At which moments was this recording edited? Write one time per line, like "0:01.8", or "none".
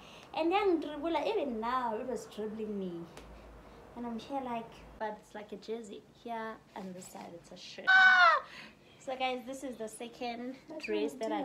0:04.9
0:07.9